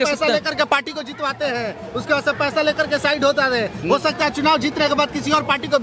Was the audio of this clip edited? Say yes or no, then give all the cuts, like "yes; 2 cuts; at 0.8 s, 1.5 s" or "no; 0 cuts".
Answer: no; 0 cuts